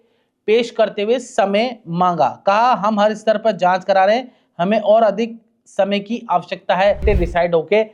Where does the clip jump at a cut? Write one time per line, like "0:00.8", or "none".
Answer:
0:07.0